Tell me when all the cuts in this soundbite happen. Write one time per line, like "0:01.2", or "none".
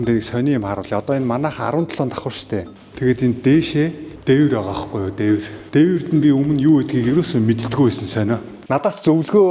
0:02.7
0:08.5